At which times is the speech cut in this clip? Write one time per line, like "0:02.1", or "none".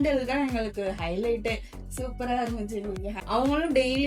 0:03.2